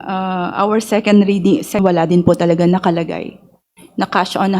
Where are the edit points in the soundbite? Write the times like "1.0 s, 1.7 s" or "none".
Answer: 1.8 s